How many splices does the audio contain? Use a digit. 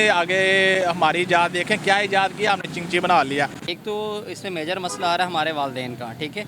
1